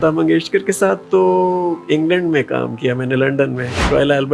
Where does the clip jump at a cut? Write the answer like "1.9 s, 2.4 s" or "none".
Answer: none